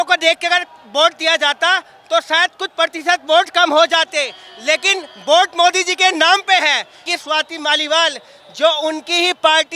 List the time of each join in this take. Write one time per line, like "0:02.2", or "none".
0:07.1